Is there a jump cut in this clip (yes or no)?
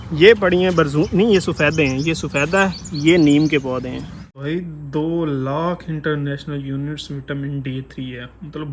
yes